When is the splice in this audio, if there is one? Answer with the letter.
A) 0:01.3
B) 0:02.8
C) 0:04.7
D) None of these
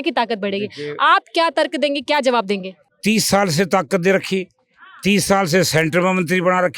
B